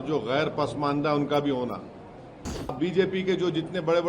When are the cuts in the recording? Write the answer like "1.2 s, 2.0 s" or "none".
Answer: 2.7 s